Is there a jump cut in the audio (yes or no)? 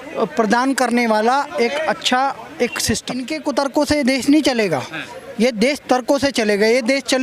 yes